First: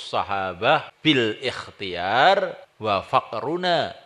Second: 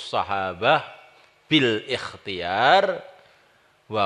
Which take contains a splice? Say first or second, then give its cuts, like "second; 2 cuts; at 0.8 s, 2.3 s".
first; 2 cuts; at 0.9 s, 2.7 s